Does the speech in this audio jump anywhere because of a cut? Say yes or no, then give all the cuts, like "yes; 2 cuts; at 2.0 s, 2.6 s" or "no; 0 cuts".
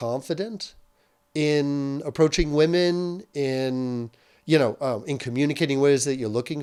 no; 0 cuts